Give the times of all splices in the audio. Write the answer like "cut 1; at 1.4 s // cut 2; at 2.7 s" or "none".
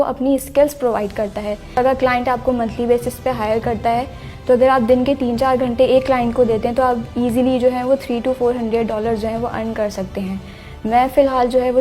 cut 1; at 1.7 s